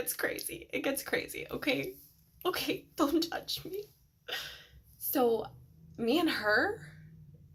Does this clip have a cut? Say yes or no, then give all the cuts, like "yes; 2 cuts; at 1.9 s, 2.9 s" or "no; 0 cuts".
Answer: no; 0 cuts